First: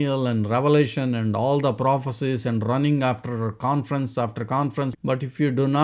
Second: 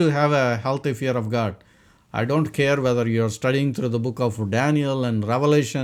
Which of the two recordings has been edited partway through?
first; 1 cut; at 4.9 s

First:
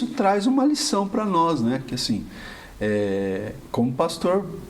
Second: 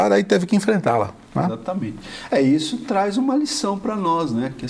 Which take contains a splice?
first; 1 cut; at 3.6 s

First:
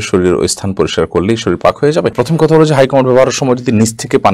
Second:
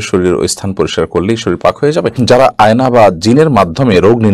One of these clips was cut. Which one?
second; 1 cut; at 2.1 s

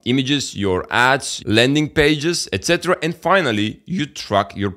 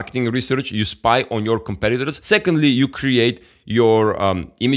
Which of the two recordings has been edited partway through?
second; 1 cut; at 2.1 s

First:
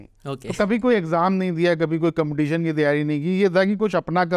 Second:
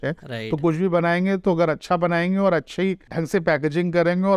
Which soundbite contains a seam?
second; 1 cut; at 3.1 s

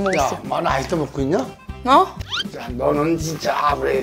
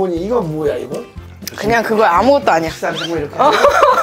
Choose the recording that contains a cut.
second; 1 cut; at 1.2 s

